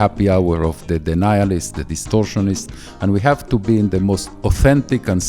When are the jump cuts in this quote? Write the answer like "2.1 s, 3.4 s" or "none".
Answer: 4.3 s